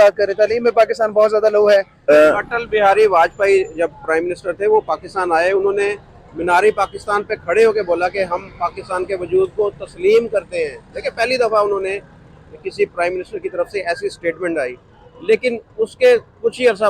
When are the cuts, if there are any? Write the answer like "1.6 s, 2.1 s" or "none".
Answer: 1.9 s